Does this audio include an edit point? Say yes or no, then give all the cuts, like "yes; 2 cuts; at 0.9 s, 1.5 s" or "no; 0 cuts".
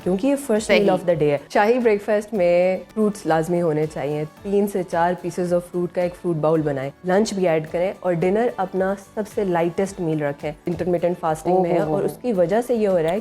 yes; 4 cuts; at 1.5 s, 2.9 s, 6.9 s, 10.7 s